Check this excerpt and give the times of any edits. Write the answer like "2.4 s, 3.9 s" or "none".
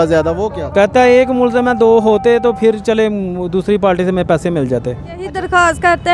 1.0 s, 5.2 s